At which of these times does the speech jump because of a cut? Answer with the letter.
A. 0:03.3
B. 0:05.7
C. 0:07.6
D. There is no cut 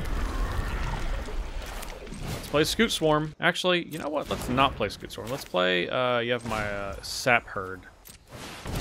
A